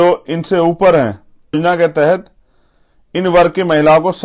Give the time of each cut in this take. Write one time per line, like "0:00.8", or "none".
0:01.5